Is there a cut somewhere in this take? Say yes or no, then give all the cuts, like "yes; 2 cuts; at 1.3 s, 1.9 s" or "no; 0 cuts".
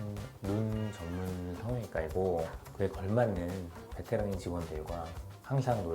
yes; 1 cut; at 2.6 s